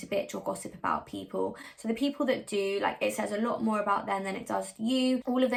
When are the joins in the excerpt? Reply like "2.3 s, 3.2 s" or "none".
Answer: none